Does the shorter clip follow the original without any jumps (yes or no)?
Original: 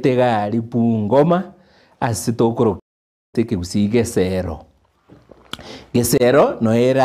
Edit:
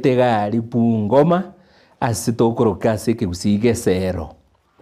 no